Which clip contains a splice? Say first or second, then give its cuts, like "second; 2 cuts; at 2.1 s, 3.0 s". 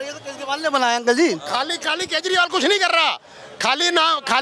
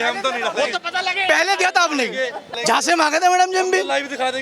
second; 1 cut; at 2.6 s